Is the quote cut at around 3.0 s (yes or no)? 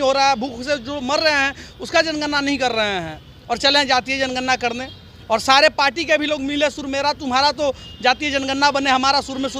no